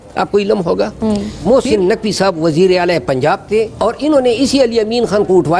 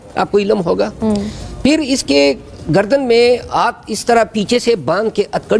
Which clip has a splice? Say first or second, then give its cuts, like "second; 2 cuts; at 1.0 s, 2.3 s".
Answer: first; 2 cuts; at 1.3 s, 3.7 s